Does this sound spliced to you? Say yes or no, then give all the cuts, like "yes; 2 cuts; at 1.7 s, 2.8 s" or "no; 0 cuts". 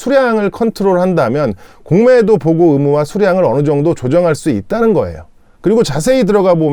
no; 0 cuts